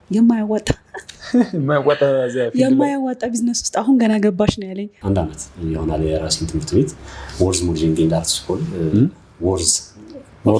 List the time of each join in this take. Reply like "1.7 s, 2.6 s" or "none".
4.9 s